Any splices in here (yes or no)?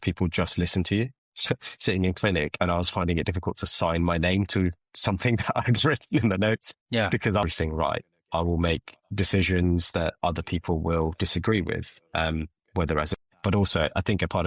yes